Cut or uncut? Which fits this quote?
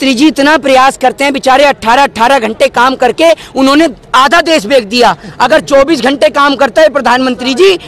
uncut